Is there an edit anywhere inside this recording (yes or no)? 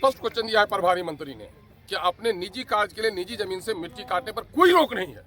no